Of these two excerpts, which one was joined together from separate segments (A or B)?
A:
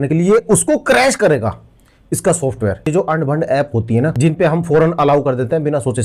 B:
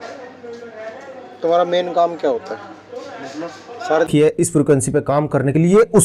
B